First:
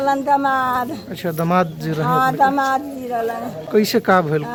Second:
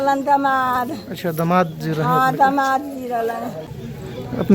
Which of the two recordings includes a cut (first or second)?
second